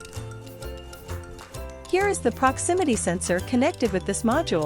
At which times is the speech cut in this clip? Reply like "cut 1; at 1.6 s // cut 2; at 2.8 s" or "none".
cut 1; at 1.9 s